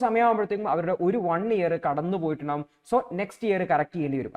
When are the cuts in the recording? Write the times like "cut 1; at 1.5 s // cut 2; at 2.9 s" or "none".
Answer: none